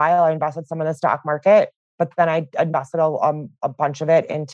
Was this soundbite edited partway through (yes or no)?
yes